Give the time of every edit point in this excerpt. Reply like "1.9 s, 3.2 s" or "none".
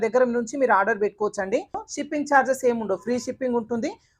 1.8 s